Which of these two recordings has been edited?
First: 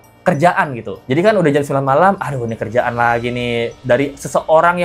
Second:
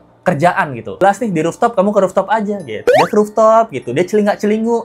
second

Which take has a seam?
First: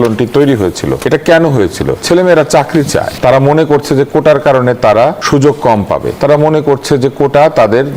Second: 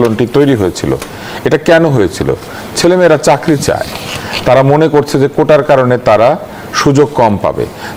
first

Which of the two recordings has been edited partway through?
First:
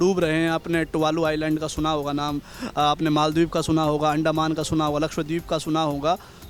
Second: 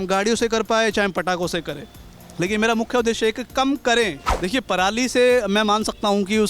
second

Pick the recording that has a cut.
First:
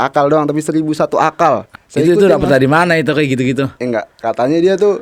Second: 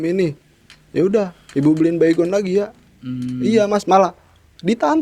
first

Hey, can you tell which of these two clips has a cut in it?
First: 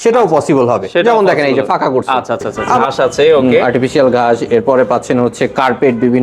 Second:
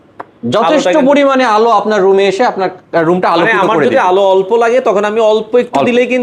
first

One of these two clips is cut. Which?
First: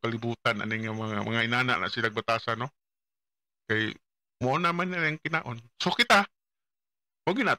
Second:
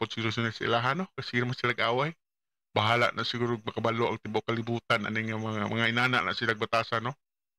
first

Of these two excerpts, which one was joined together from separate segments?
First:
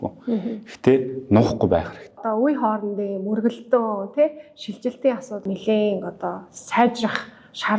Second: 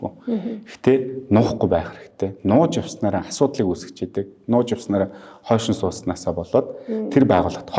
first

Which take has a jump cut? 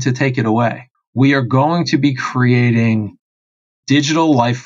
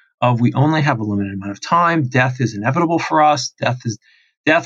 first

